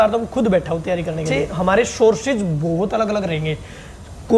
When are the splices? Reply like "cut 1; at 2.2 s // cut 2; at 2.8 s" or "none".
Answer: cut 1; at 1.3 s